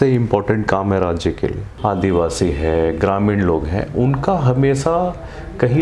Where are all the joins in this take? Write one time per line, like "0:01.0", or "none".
0:01.7

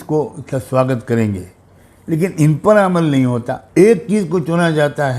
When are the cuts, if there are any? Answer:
0:03.6

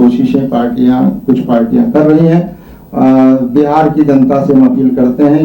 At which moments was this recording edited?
none

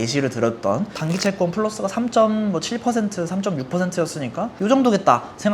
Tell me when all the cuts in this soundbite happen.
0:00.9

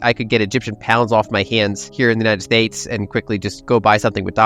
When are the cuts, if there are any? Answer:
0:01.8
0:03.5

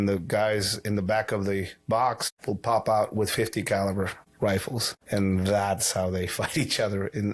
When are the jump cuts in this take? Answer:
0:02.3
0:04.2
0:04.9

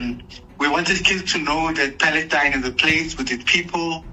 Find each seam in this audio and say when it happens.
none

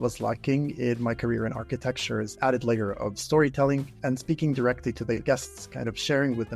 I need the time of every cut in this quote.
0:02.3
0:03.9

